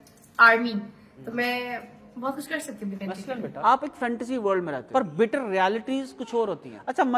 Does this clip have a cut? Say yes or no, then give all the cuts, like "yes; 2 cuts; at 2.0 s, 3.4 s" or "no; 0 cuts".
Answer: yes; 2 cuts; at 3.6 s, 4.8 s